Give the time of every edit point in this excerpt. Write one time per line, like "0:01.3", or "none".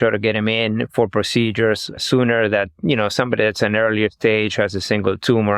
none

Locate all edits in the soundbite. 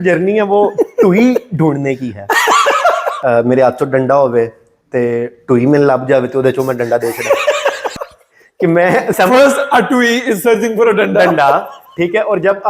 0:03.1
0:07.9
0:09.1

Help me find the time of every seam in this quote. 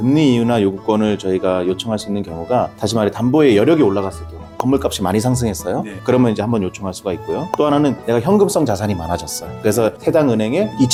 none

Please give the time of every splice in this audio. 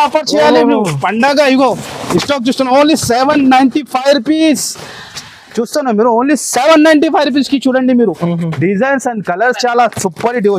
none

